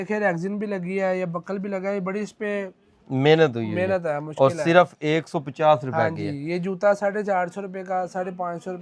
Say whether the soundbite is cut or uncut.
uncut